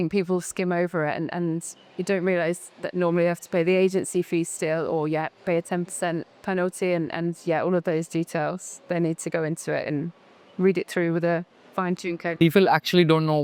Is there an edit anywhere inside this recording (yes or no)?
no